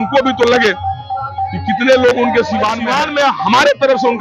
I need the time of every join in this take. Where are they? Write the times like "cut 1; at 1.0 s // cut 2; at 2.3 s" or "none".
cut 1; at 2.8 s